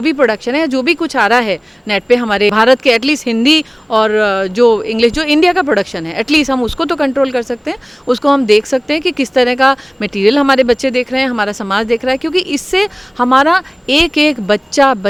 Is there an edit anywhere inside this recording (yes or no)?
no